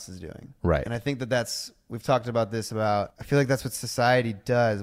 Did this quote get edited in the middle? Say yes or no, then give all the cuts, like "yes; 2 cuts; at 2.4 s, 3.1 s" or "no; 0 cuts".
yes; 1 cut; at 3.2 s